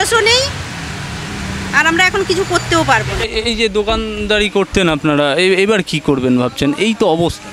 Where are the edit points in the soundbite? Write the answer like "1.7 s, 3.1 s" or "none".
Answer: 3.2 s